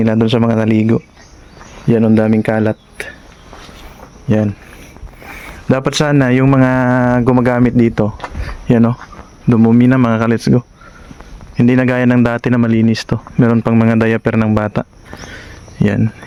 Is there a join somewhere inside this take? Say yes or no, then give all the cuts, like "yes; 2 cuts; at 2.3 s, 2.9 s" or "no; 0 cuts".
no; 0 cuts